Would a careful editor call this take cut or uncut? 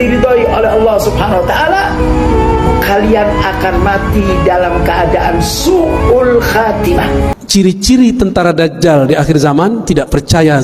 cut